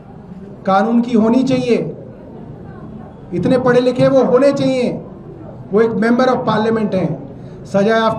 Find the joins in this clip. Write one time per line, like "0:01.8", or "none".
none